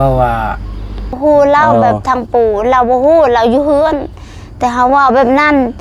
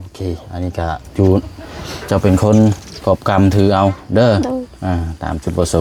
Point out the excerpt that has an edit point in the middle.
first; 1 cut; at 1.2 s

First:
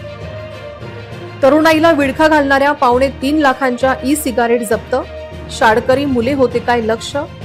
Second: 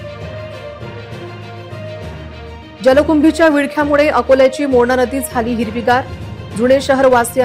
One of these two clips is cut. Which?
second; 2 cuts; at 0.8 s, 2.3 s

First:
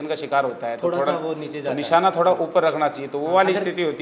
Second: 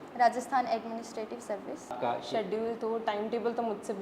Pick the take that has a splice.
second; 1 cut; at 1.9 s

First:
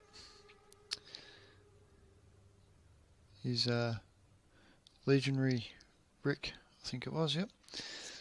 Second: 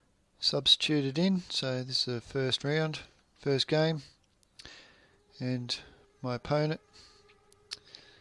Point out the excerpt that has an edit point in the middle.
second; 1 cut; at 5.4 s

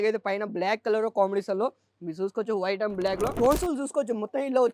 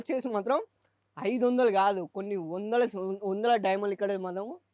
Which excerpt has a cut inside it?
first; 1 cut; at 3.3 s

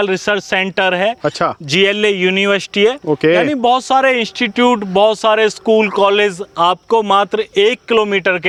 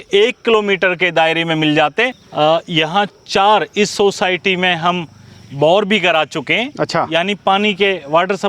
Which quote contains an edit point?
second; 1 cut; at 2.2 s

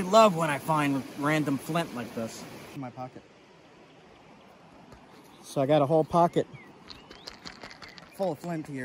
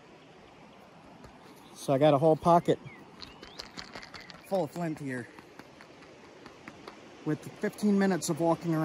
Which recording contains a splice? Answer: first; 1 cut; at 2.8 s

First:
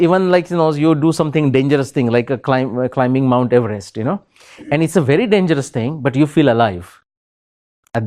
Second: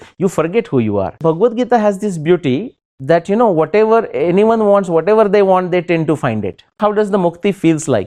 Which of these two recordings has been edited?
second; 2 cuts; at 1.2 s, 6.8 s

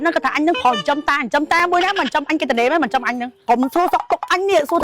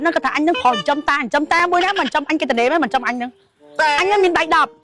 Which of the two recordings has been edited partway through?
first; 1 cut; at 3.4 s

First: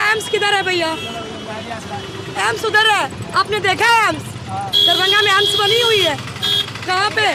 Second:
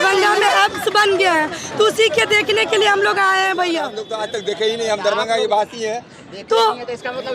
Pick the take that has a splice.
second; 1 cut; at 4.0 s

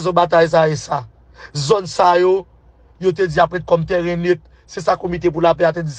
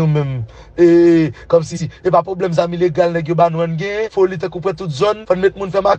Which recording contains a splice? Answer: second; 2 cuts; at 4.1 s, 5.2 s

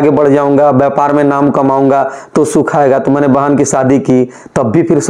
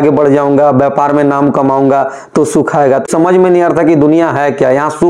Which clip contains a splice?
second; 1 cut; at 3.1 s

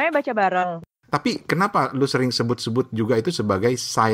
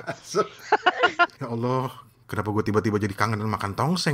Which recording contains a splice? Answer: first; 1 cut; at 0.9 s

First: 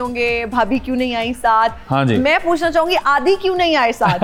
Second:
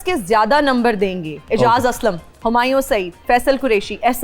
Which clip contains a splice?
second; 2 cuts; at 1.3 s, 2.3 s

